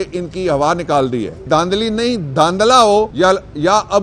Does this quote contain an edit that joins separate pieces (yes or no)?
yes